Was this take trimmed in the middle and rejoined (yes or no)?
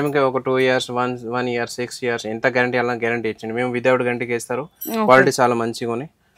no